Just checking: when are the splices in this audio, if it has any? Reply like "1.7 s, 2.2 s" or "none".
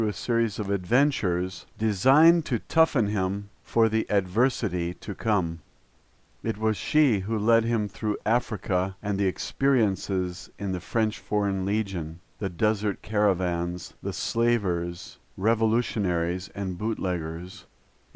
4.5 s